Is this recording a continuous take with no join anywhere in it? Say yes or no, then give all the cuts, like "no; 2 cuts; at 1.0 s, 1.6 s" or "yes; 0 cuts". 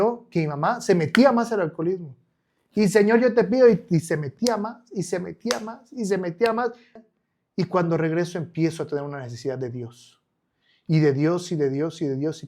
no; 1 cut; at 6.9 s